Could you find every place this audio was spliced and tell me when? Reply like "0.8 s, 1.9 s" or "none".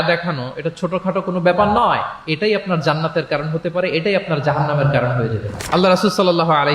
none